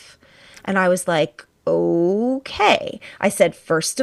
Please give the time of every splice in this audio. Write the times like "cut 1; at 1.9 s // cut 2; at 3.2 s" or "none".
none